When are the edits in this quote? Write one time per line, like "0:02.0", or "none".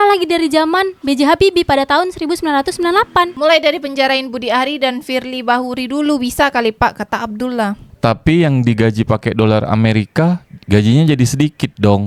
none